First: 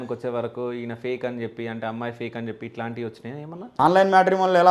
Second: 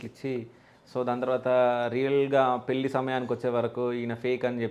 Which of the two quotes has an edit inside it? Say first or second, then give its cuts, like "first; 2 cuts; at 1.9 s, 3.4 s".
first; 1 cut; at 3.7 s